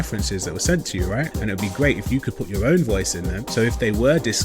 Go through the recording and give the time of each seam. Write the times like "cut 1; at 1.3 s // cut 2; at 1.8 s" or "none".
cut 1; at 3.4 s